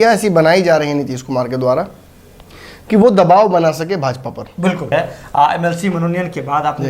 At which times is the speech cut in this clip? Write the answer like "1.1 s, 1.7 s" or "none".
4.9 s